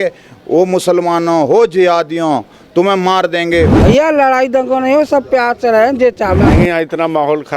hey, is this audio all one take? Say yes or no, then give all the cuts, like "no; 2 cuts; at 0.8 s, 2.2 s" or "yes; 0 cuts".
no; 2 cuts; at 3.7 s, 6.4 s